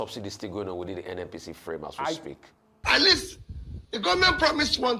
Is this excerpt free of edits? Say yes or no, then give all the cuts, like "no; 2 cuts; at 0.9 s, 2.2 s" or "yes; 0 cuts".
no; 1 cut; at 2.7 s